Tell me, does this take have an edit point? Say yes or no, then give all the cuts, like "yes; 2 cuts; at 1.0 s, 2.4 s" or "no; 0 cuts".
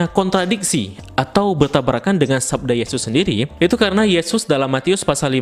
no; 0 cuts